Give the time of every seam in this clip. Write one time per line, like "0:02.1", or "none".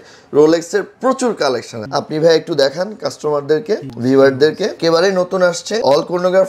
0:04.8